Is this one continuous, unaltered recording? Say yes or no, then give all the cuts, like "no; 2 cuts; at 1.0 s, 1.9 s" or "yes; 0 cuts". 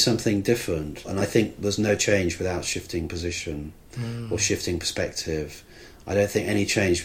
no; 1 cut; at 1.1 s